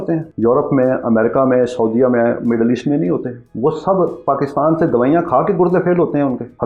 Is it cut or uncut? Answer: uncut